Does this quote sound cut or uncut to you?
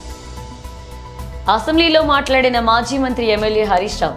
uncut